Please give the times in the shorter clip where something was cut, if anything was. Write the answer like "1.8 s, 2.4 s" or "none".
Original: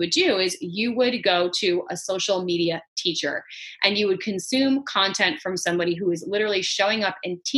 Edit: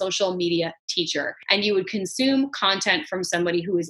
1.4 s